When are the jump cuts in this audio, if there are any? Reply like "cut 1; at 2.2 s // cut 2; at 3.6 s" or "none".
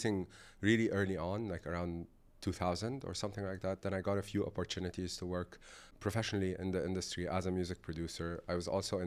none